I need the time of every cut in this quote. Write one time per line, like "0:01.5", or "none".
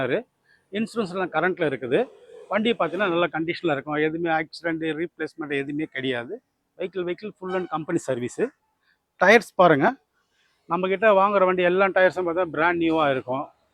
none